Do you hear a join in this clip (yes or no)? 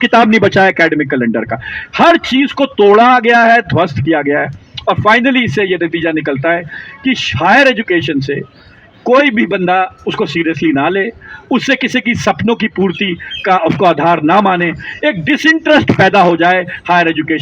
no